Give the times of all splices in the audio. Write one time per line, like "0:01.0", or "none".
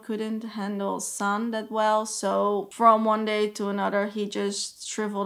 none